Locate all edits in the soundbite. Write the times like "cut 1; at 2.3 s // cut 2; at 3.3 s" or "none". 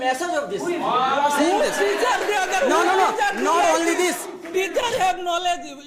none